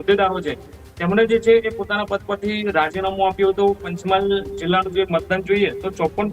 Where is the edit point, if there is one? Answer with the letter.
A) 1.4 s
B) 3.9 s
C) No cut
B